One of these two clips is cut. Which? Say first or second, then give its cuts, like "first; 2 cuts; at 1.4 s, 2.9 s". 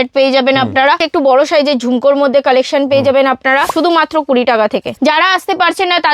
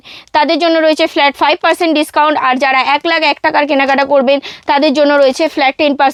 first; 3 cuts; at 1.0 s, 3.7 s, 4.9 s